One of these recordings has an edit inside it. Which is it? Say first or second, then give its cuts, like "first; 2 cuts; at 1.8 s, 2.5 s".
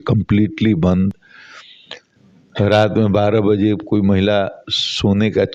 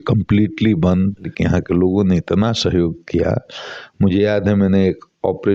second; 1 cut; at 1.3 s